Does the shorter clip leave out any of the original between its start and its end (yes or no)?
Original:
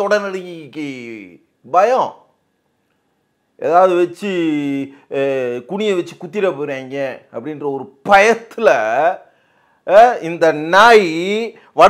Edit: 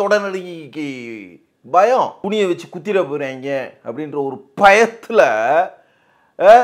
yes